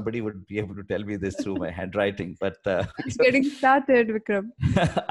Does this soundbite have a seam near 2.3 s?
yes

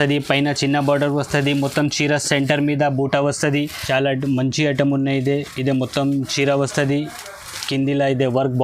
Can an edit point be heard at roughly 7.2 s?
no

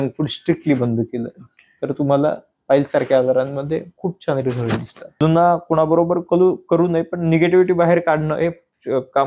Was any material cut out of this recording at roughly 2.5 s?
no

